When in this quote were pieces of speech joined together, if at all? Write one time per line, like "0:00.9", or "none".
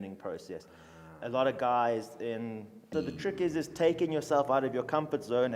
0:02.9

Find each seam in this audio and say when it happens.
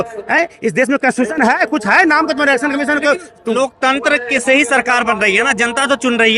none

